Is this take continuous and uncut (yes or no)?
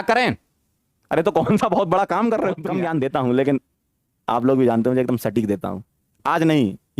no